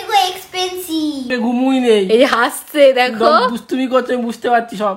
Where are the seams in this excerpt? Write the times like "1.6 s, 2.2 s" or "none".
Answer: 1.3 s